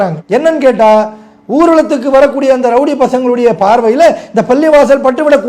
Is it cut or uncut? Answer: uncut